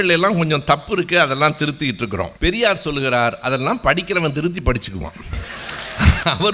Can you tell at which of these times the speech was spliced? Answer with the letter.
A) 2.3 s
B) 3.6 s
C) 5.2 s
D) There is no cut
A